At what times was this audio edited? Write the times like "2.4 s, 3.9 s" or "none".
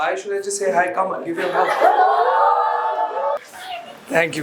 3.4 s